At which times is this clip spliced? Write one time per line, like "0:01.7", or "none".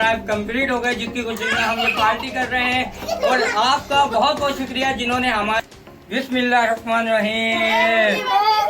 0:05.6